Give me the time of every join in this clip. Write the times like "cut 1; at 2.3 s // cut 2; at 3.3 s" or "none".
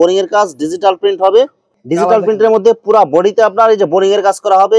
cut 1; at 1.6 s